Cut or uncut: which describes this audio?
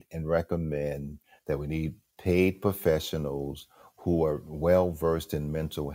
uncut